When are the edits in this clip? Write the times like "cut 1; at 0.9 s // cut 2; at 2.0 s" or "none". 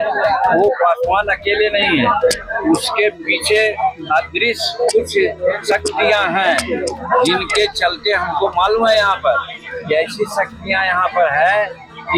none